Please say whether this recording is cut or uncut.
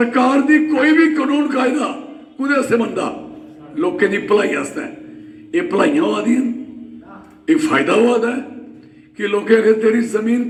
uncut